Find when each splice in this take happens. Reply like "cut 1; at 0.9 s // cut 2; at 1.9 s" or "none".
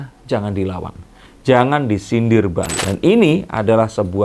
cut 1; at 2.8 s

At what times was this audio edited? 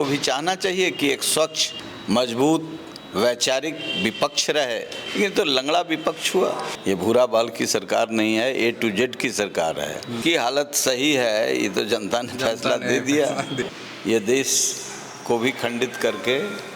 cut 1; at 5.0 s // cut 2; at 6.7 s // cut 3; at 10.2 s // cut 4; at 13.7 s

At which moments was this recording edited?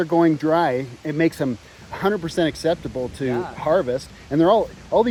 none

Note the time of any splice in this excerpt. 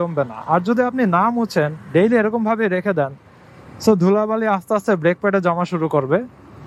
none

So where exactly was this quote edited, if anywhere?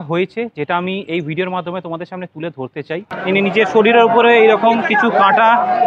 cut 1; at 3.1 s

